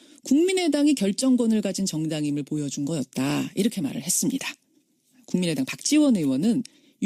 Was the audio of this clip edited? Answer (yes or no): no